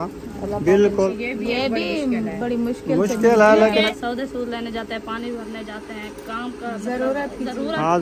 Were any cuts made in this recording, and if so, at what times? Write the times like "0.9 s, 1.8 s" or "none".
1.1 s, 3.9 s